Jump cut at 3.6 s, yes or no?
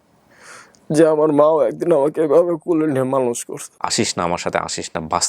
yes